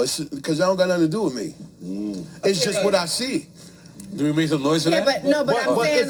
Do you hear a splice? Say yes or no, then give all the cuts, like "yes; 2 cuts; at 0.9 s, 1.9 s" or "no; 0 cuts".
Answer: no; 0 cuts